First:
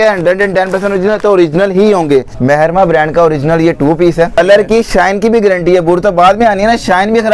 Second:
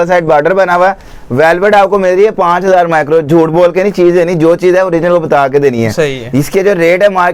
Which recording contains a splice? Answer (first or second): first